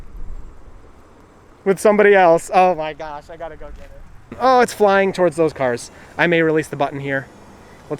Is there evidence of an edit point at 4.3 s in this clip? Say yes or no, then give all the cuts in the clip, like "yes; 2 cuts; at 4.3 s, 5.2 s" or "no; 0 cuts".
yes; 1 cut; at 4.3 s